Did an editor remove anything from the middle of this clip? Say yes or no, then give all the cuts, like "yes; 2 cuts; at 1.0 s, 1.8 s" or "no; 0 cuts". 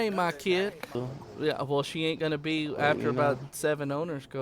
yes; 1 cut; at 1.0 s